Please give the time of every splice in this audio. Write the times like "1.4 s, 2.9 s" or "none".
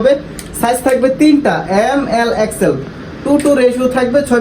none